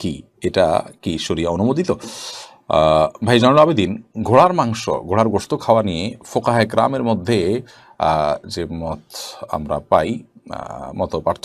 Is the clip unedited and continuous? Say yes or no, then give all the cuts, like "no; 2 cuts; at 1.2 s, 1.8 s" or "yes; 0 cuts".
yes; 0 cuts